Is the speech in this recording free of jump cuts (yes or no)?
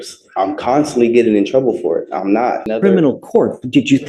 no